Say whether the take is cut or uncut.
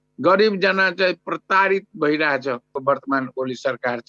cut